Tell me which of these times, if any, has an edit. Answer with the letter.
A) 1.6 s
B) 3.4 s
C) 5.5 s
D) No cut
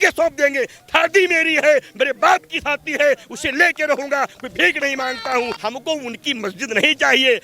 C